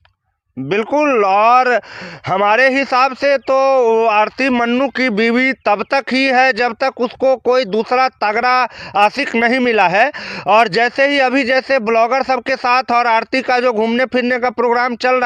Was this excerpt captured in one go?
yes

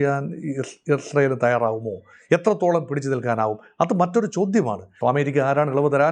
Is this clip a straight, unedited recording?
no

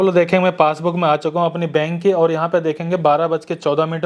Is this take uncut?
yes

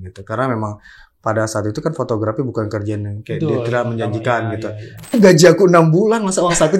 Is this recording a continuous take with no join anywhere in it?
no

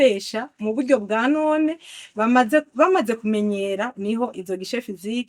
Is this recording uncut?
yes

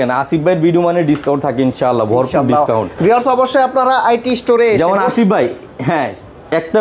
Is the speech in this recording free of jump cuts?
yes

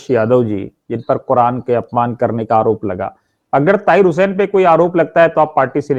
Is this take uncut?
yes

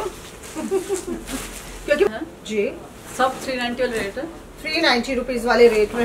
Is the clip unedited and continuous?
no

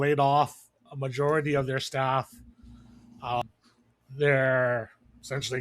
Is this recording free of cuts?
no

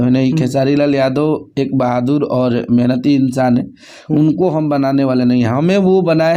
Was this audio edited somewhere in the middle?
no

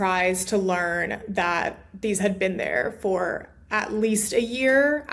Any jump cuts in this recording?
no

